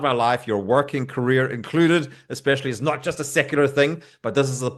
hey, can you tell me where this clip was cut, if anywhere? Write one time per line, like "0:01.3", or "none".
none